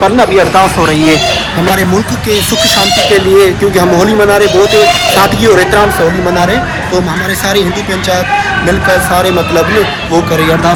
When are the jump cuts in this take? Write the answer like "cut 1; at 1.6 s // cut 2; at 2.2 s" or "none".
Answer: none